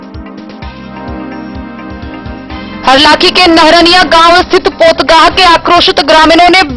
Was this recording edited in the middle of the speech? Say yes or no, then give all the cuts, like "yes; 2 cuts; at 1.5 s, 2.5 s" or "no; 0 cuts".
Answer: no; 0 cuts